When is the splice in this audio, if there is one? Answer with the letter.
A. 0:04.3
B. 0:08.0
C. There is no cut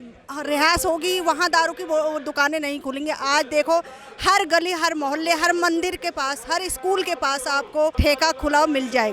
B